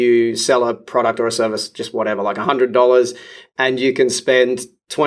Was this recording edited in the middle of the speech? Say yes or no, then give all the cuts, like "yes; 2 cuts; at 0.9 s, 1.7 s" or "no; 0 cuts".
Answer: no; 0 cuts